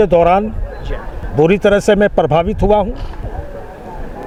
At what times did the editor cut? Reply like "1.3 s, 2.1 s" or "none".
none